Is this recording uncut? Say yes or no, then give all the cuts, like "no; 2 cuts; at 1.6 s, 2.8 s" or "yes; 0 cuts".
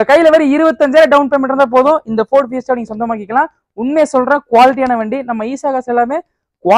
yes; 0 cuts